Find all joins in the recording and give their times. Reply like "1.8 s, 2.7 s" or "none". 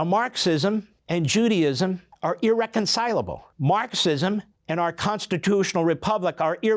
0.9 s, 2.1 s, 3.4 s, 4.5 s